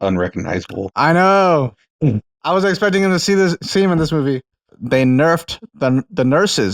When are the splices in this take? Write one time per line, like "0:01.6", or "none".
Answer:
0:04.8